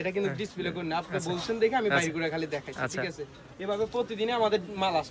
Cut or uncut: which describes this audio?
uncut